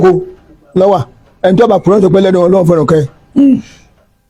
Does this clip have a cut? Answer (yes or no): no